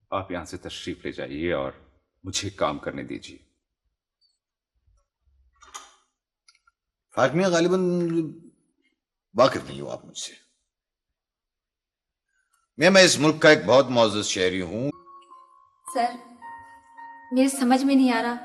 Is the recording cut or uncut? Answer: cut